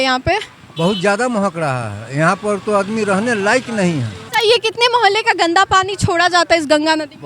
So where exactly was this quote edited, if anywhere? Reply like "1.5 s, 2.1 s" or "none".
4.2 s